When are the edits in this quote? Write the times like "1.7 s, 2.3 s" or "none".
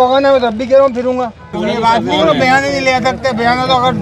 1.5 s